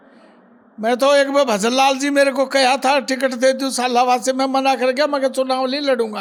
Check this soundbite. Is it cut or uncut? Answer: uncut